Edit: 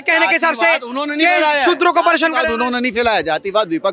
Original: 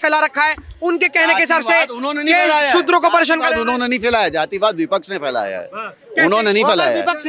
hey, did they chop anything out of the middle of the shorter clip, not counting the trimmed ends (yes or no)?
no